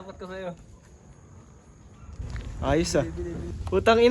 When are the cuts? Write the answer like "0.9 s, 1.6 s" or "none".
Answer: 2.2 s